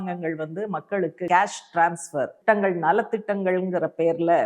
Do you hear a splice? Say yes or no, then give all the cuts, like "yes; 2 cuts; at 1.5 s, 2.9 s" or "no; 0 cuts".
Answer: yes; 2 cuts; at 1.3 s, 2.4 s